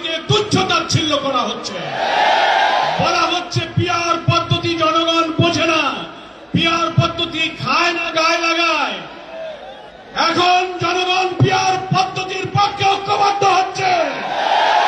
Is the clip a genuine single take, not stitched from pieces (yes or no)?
yes